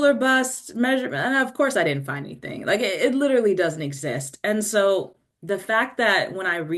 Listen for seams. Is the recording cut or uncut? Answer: uncut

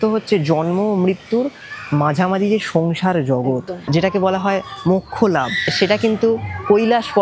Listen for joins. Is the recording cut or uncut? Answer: cut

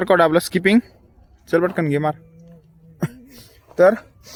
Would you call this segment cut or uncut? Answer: uncut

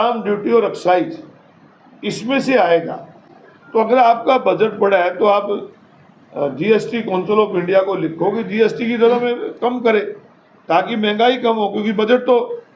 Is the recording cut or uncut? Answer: uncut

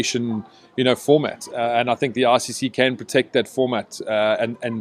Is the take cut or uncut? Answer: uncut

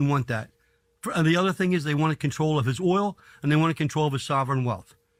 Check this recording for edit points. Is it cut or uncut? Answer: uncut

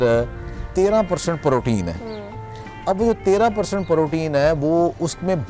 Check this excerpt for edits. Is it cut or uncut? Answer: uncut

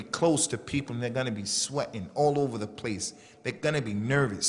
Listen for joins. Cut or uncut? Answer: cut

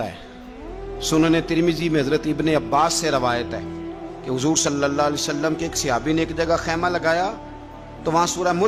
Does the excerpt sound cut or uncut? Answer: uncut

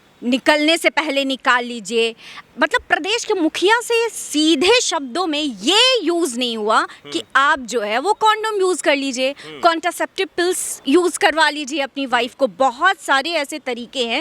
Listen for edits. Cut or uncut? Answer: cut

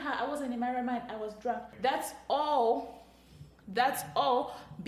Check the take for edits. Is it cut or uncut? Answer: cut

